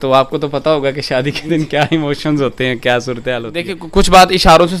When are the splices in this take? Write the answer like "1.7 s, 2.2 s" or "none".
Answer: 3.8 s